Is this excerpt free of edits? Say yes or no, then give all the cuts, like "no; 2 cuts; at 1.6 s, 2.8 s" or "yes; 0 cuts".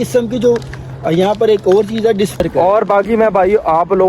no; 1 cut; at 2.3 s